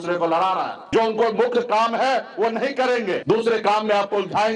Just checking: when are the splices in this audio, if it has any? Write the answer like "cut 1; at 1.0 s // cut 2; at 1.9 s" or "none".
cut 1; at 0.9 s // cut 2; at 3.2 s